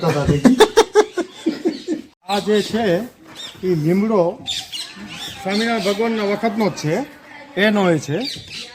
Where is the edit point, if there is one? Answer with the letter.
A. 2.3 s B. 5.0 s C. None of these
A